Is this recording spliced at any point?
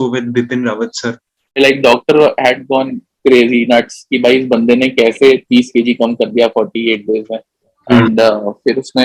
yes; 1 cut; at 1.6 s

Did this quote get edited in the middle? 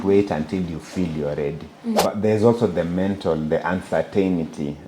yes; 1 cut; at 2.0 s

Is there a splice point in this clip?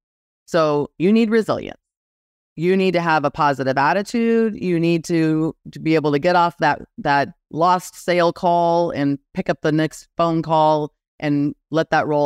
no; 0 cuts

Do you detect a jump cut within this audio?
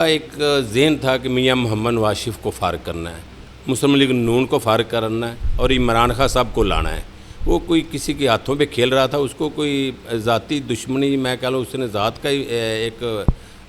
no; 0 cuts

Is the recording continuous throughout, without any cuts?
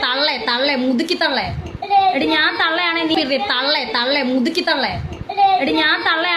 yes; 0 cuts

